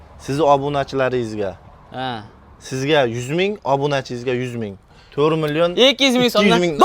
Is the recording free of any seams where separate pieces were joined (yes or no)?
yes